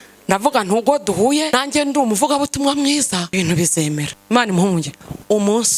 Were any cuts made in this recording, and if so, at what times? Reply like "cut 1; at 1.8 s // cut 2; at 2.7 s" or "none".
cut 1; at 1.5 s // cut 2; at 3.3 s // cut 3; at 4.2 s